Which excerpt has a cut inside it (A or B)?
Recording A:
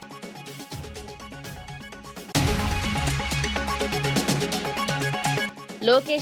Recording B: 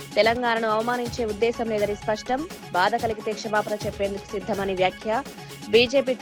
A